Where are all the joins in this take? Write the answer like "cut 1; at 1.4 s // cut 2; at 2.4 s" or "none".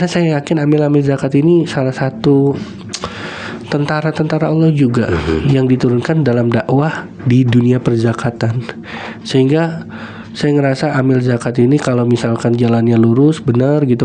none